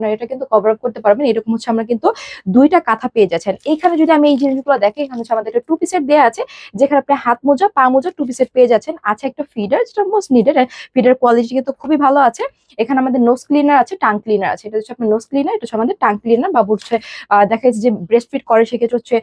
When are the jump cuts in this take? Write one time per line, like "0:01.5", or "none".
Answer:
none